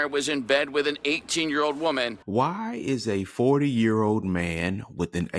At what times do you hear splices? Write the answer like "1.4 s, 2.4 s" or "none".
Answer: 2.2 s